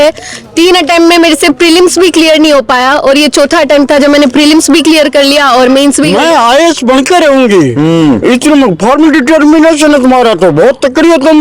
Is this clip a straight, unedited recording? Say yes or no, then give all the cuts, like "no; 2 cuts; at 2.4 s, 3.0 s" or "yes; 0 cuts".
no; 1 cut; at 6.1 s